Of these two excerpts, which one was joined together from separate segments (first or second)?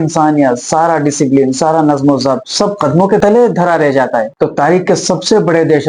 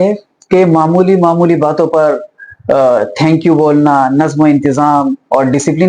first